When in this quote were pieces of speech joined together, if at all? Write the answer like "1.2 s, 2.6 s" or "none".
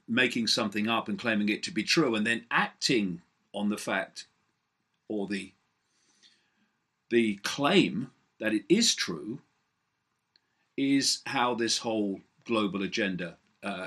12.0 s